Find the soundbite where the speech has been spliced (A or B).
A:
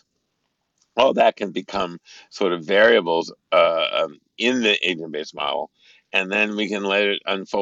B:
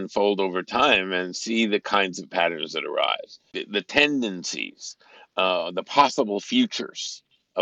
B